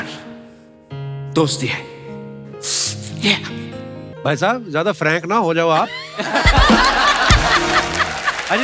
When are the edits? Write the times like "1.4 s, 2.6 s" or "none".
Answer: 4.1 s